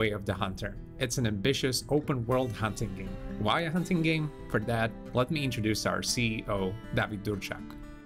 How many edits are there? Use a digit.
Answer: 1